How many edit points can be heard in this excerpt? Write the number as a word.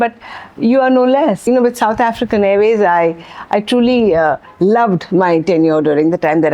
one